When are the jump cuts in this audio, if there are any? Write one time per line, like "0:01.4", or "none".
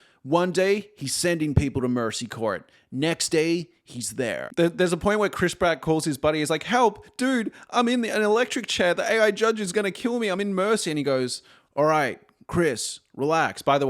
0:04.5